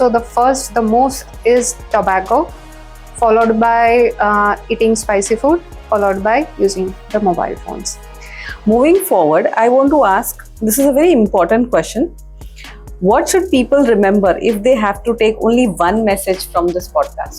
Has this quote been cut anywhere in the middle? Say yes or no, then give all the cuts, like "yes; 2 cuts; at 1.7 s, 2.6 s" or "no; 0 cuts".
yes; 1 cut; at 8.2 s